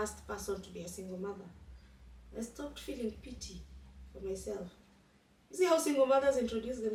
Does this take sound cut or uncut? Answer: uncut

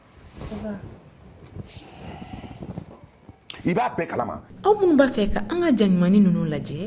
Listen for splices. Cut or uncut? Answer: cut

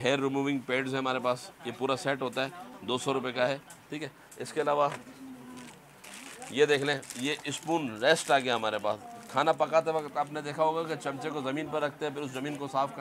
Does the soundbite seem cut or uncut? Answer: uncut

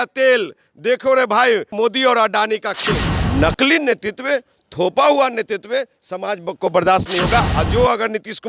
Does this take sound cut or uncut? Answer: cut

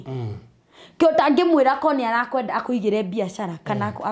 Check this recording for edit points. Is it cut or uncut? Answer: uncut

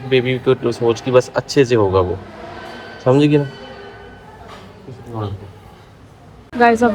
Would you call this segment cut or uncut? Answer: uncut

